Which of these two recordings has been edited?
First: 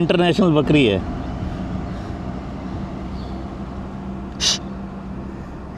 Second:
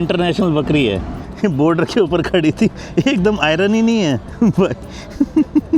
second; 2 cuts; at 1.2 s, 4.3 s

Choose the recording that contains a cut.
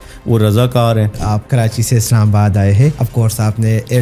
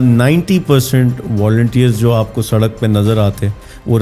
first; 2 cuts; at 1.3 s, 3.0 s

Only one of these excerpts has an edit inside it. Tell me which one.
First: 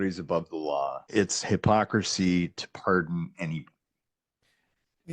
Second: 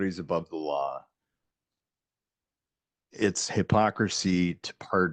first; 1 cut; at 1.0 s

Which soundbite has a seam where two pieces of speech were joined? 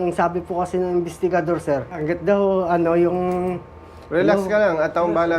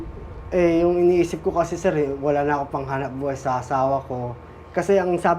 first; 1 cut; at 2.0 s

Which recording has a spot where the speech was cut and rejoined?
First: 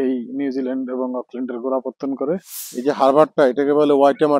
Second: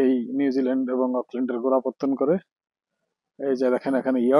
first; 1 cut; at 2.6 s

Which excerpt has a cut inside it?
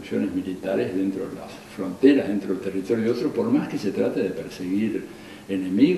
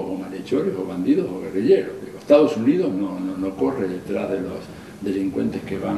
second; 1 cut; at 2.7 s

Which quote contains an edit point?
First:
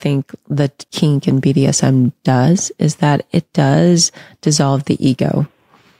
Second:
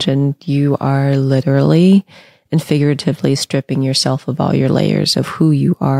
first; 1 cut; at 0.9 s

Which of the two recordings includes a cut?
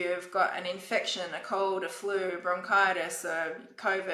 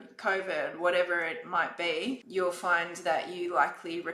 second; 1 cut; at 2.2 s

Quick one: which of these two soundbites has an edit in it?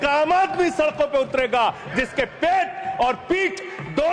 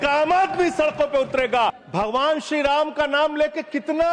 second; 1 cut; at 1.8 s

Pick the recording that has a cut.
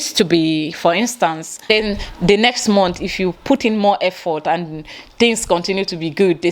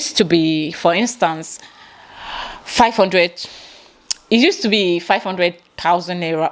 first; 1 cut; at 1.7 s

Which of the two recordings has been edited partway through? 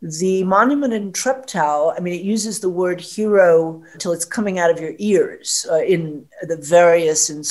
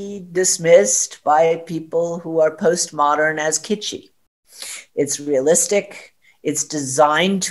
first; 2 cuts; at 1.1 s, 4.0 s

